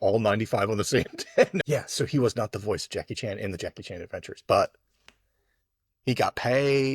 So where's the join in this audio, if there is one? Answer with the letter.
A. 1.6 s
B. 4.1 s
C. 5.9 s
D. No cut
A